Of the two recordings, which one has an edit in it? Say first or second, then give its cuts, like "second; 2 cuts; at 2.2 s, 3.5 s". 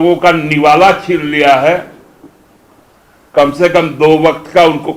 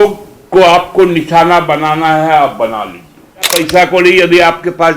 second; 1 cut; at 3.6 s